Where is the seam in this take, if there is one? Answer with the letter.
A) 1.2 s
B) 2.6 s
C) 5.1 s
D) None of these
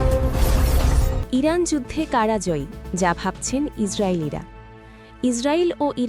A